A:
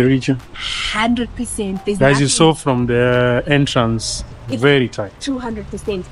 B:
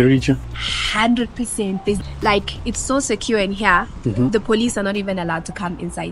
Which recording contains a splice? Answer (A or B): B